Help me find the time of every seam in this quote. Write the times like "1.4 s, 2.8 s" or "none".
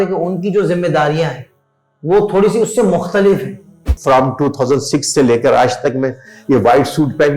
3.9 s